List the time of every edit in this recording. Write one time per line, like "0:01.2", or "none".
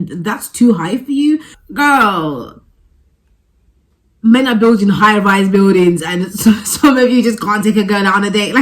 0:01.6

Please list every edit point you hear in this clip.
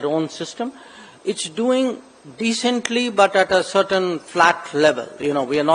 none

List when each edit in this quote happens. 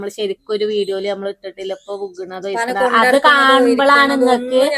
none

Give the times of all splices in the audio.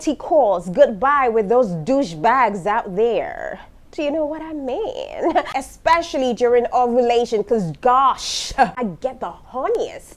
0:05.6
0:08.7

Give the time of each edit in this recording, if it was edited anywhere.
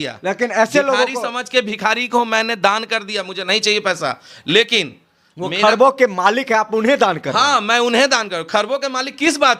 none

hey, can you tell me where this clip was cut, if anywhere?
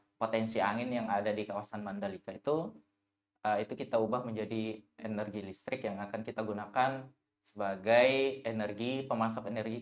none

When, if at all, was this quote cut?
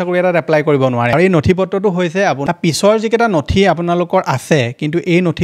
0:02.5

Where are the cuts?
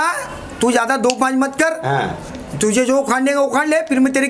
none

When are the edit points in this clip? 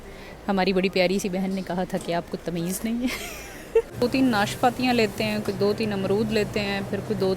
0:03.9

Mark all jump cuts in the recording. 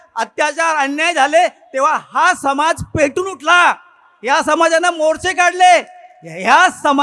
none

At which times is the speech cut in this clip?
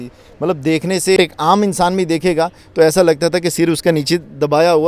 0:01.2

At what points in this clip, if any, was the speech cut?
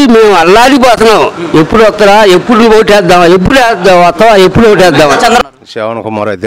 0:05.4

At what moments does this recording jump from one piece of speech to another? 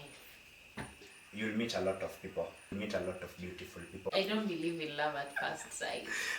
0:01.2
0:02.7
0:04.1

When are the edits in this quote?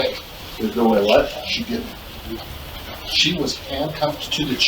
none

